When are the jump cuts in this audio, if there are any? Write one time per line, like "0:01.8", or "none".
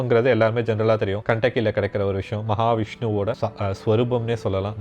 0:01.2
0:03.4